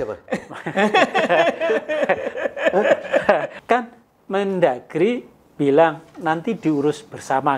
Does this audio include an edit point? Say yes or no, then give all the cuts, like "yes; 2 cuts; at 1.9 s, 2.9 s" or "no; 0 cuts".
yes; 1 cut; at 3.5 s